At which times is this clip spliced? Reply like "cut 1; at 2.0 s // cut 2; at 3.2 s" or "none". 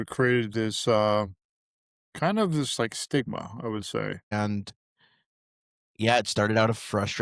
cut 1; at 4.3 s